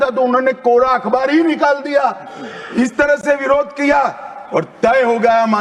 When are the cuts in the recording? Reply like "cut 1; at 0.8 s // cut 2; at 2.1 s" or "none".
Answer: none

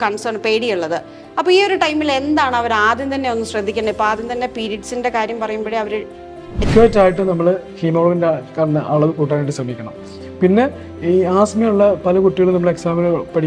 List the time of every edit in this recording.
cut 1; at 6.7 s

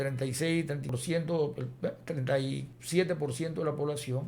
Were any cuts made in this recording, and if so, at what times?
cut 1; at 0.9 s // cut 2; at 2.7 s

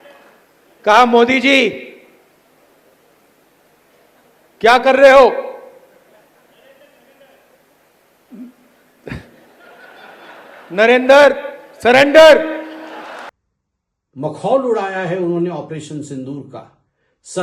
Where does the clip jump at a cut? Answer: cut 1; at 13.3 s

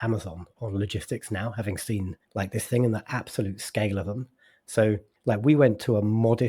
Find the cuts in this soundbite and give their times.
cut 1; at 2.2 s // cut 2; at 5.1 s

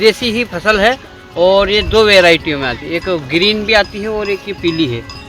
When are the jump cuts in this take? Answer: none

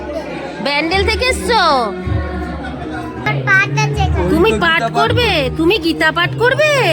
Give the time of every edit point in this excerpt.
cut 1; at 3.3 s

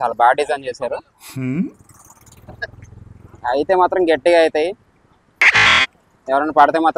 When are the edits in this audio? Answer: none

